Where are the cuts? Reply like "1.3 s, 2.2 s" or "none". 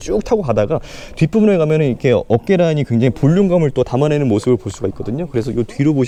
none

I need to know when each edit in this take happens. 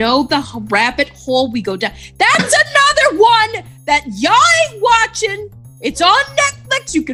none

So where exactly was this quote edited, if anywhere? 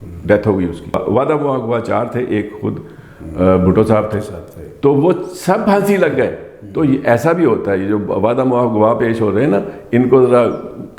1.0 s

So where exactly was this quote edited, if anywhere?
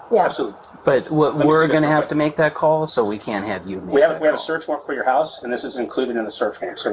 none

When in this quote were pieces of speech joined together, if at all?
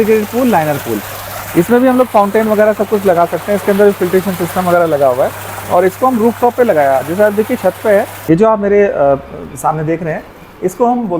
8.1 s

